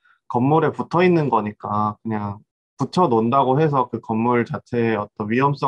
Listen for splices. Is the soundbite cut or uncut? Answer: cut